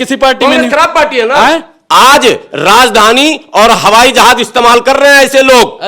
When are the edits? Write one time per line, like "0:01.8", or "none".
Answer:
0:01.7